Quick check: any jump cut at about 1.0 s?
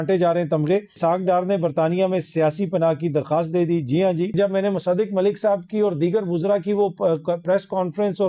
yes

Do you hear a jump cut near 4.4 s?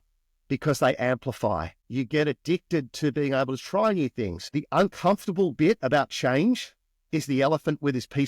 yes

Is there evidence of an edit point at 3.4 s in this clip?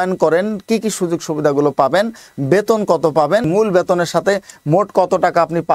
yes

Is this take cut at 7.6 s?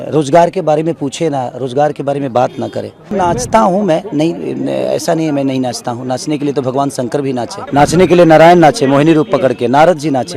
yes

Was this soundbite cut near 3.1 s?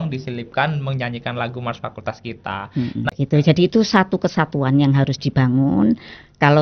yes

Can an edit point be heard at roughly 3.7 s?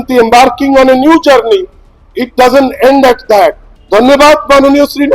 yes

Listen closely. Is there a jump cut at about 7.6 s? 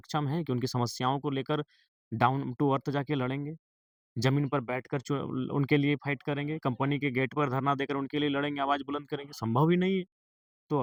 no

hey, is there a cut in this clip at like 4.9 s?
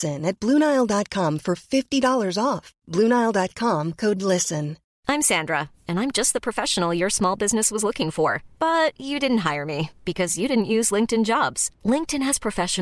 yes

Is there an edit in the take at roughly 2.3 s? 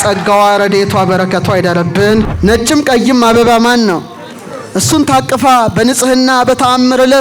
yes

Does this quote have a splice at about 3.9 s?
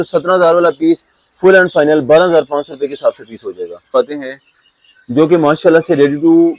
yes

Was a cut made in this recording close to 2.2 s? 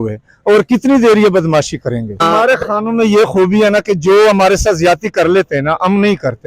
yes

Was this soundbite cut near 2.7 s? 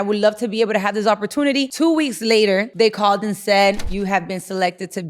yes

